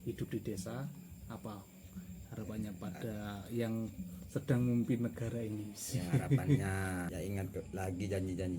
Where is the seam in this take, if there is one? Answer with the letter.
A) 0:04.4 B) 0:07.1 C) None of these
B